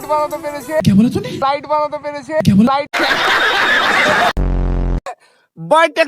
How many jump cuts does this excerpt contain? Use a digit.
1